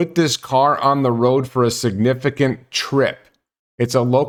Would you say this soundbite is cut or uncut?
uncut